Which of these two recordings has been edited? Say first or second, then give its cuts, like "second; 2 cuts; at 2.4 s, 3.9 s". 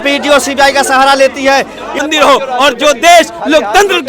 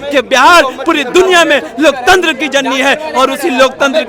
first; 1 cut; at 2.0 s